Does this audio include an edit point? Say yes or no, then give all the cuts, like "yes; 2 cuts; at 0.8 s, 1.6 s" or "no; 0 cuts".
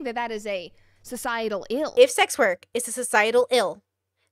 yes; 1 cut; at 1.9 s